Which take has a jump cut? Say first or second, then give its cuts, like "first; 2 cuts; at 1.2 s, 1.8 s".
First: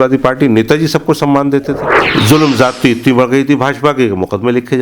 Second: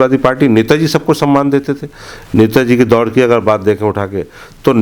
first; 1 cut; at 1.9 s